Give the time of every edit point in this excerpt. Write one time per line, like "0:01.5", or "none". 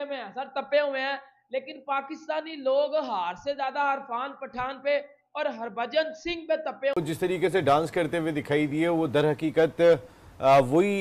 0:07.0